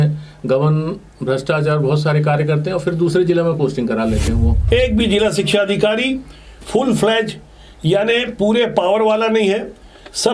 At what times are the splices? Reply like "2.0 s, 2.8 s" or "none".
4.6 s